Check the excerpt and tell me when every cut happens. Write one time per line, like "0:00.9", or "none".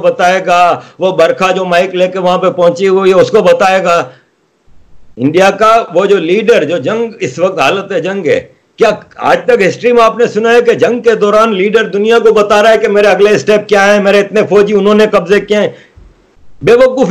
none